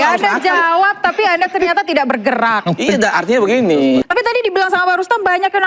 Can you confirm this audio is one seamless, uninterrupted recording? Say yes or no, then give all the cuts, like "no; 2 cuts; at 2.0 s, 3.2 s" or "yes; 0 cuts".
no; 1 cut; at 4.0 s